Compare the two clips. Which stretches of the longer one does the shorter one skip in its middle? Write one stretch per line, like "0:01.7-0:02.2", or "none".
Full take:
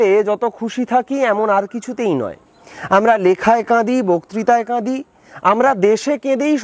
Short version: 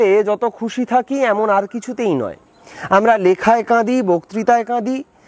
none